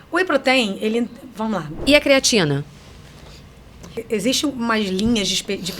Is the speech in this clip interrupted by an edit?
yes; 2 cuts; at 1.7 s, 4.0 s

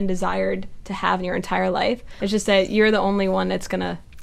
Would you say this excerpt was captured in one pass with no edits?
no; 1 cut; at 2.2 s

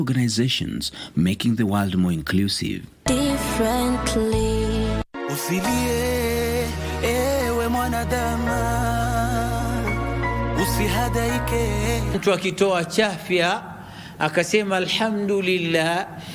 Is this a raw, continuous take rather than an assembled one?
no; 1 cut; at 5.0 s

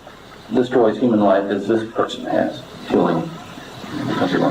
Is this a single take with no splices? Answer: no; 1 cut; at 2.7 s

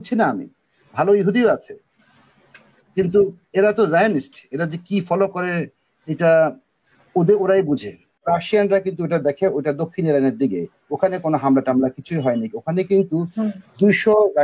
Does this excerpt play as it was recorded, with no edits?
no; 1 cut; at 8.2 s

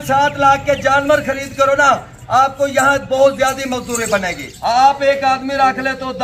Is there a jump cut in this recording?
yes; 1 cut; at 4.4 s

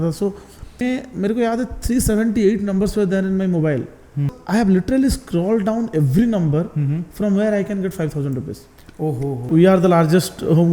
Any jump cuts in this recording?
yes; 3 cuts; at 0.8 s, 4.3 s, 9.4 s

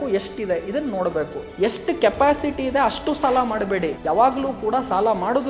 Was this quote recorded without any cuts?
no; 2 cuts; at 1.4 s, 4.0 s

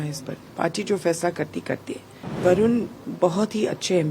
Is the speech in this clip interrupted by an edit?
yes; 2 cuts; at 2.4 s, 3.0 s

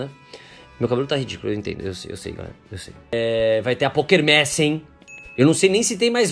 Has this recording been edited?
yes; 1 cut; at 3.1 s

